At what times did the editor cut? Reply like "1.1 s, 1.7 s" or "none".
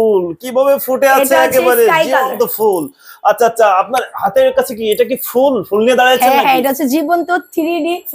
none

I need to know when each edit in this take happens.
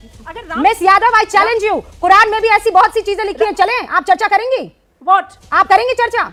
none

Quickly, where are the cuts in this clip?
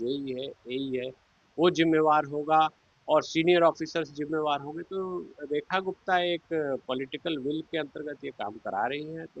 none

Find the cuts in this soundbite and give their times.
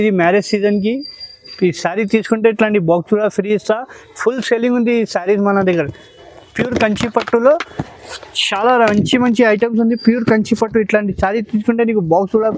none

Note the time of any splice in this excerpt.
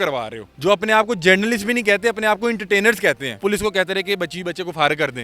3.4 s

